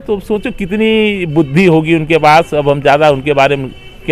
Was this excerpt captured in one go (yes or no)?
yes